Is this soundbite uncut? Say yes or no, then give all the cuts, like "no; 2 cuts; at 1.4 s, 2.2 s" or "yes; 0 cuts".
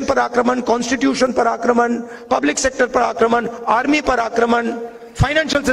yes; 0 cuts